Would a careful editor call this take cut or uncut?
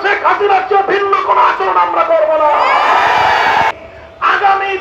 cut